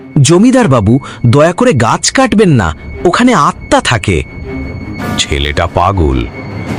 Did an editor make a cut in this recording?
no; 0 cuts

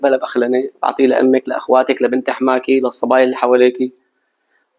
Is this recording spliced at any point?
no; 0 cuts

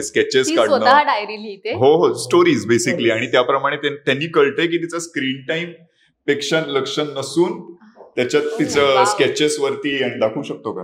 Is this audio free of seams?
yes; 0 cuts

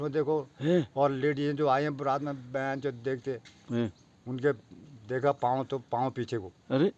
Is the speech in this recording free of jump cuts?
yes; 0 cuts

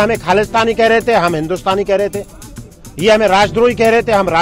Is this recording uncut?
yes; 0 cuts

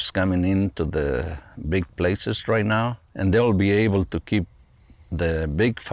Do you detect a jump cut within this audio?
yes; 1 cut; at 3.0 s

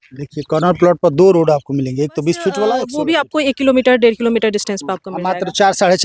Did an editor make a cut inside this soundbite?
yes; 1 cut; at 2.9 s

